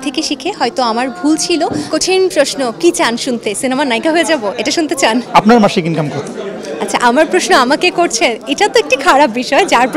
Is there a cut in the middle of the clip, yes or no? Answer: yes